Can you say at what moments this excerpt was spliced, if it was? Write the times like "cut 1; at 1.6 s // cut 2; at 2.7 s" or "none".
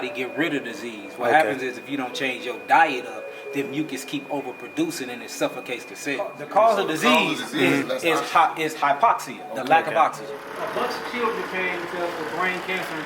cut 1; at 6.4 s // cut 2; at 10.5 s